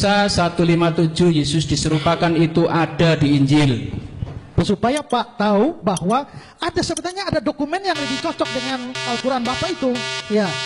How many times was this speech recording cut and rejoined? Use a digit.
1